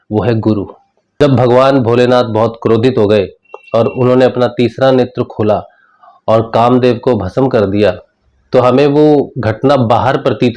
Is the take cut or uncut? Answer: cut